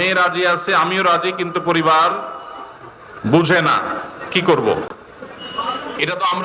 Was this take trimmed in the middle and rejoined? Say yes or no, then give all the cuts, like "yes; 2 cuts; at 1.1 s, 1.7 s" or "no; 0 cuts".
no; 0 cuts